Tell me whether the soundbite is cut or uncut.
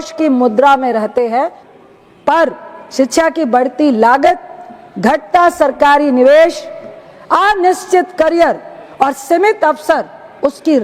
cut